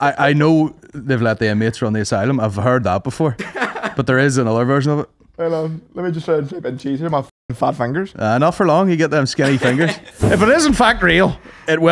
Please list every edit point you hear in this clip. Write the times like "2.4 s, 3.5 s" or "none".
10.1 s